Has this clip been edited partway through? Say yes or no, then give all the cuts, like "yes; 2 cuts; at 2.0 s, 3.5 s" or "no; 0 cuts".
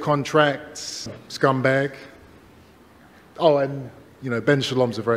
yes; 2 cuts; at 0.9 s, 3.0 s